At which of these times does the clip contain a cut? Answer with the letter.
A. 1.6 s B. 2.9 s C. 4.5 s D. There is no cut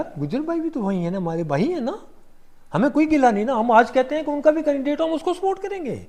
D